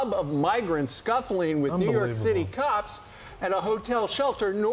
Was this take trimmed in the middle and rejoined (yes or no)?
no